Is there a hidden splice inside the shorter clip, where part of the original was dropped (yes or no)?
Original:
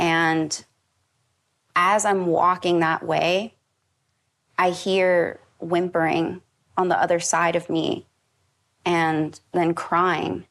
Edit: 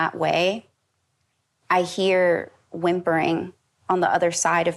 no